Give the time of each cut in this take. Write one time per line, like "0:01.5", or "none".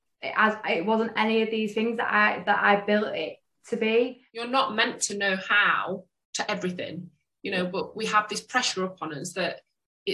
0:04.3